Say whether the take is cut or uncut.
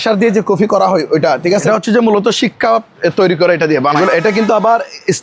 cut